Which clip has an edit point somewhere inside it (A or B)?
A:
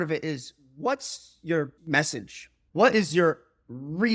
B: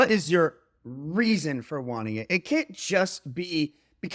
A